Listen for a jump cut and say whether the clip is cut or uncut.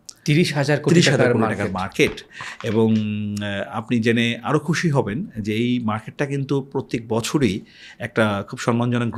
uncut